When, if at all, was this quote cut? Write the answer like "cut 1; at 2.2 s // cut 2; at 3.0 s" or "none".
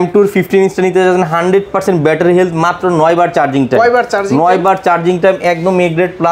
none